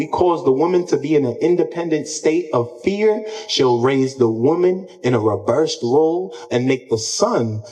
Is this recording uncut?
yes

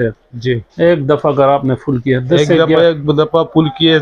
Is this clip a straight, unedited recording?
yes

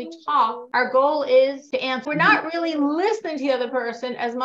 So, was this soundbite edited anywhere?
yes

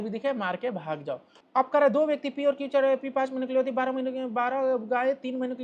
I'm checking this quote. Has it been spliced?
yes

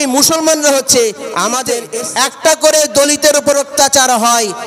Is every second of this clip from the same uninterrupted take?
no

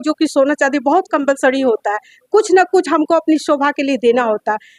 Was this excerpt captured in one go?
yes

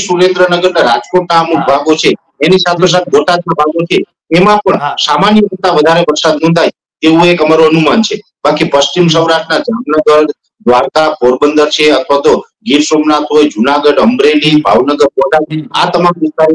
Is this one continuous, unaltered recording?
yes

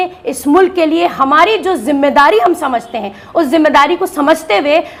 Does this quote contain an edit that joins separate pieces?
no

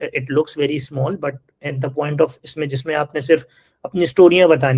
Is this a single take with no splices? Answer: yes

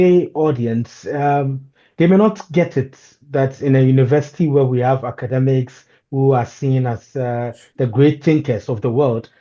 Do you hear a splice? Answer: no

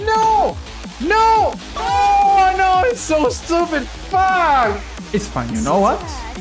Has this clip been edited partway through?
yes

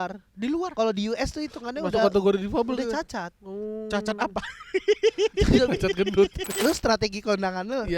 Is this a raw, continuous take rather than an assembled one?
no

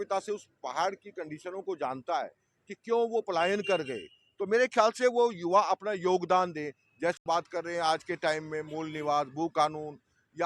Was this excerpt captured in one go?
no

